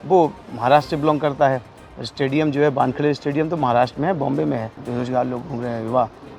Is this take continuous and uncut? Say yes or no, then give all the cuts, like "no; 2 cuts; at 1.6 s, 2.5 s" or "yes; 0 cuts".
no; 1 cut; at 4.8 s